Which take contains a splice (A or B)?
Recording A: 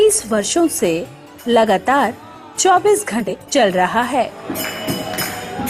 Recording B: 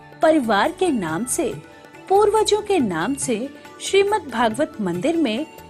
A